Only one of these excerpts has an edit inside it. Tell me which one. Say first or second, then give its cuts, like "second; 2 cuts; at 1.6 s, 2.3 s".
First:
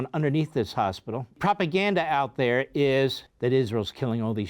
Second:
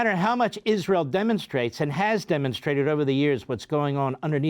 first; 2 cuts; at 1.4 s, 3.3 s